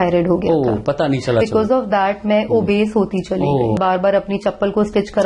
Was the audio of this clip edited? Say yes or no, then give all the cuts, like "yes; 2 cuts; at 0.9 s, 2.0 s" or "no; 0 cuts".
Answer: yes; 2 cuts; at 1.4 s, 3.8 s